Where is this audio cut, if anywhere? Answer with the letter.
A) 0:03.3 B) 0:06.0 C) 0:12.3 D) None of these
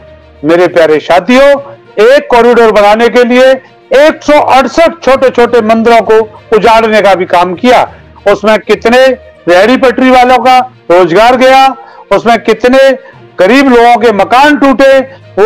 D